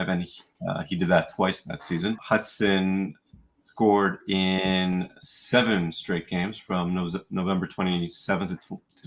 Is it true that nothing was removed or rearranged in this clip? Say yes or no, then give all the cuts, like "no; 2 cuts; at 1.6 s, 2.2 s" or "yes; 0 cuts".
no; 1 cut; at 2.2 s